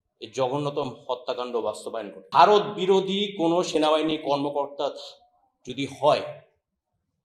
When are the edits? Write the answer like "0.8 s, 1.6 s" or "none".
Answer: 2.2 s